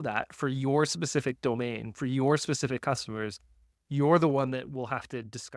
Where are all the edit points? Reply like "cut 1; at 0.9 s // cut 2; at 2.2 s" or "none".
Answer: none